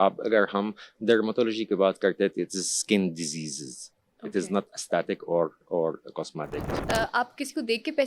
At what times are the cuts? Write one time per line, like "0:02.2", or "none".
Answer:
0:06.8